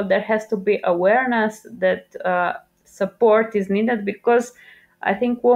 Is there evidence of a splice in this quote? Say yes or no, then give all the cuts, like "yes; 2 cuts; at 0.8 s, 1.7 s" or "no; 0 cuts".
no; 0 cuts